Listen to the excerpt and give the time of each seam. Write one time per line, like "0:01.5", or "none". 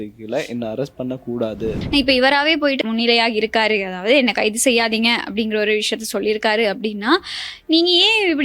0:01.8
0:02.8

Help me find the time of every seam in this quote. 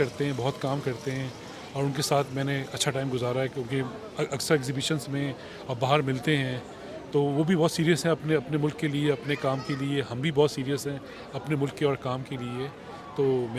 none

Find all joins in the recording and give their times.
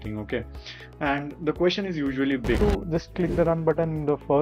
0:02.6

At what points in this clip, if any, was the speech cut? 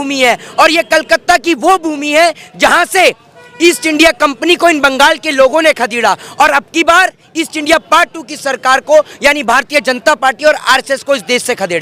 none

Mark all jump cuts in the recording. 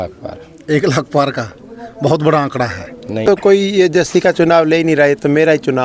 0:03.2

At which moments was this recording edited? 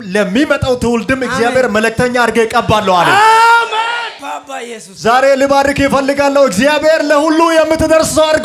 none

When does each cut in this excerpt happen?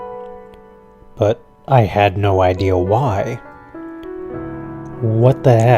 0:01.9

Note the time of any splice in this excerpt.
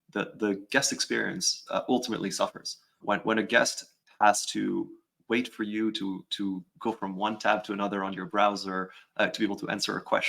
0:03.0
0:03.9

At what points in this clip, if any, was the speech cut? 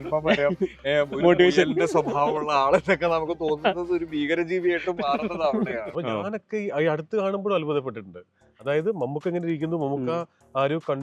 0:05.9

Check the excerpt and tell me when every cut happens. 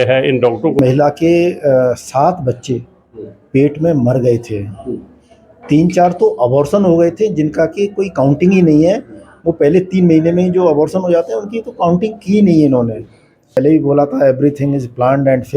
0:00.8
0:13.6

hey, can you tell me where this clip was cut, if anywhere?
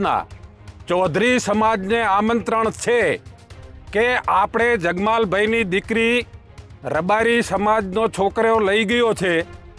none

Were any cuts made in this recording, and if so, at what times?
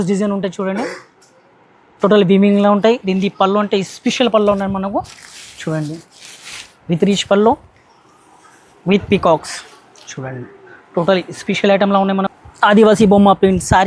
0:12.3

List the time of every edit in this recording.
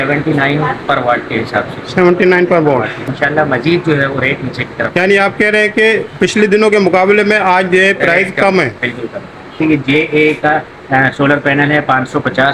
0:03.1
0:09.5

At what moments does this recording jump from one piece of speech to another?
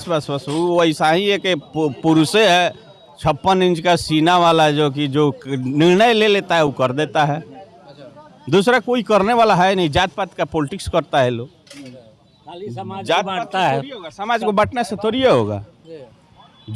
none

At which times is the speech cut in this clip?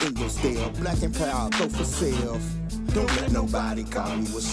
none

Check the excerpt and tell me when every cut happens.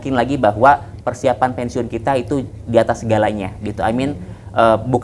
none

